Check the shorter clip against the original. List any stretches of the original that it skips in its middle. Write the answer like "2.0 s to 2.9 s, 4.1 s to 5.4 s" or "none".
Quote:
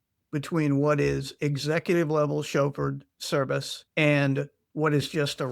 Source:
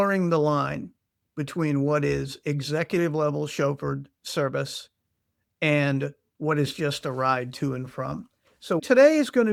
4.8 s to 5.4 s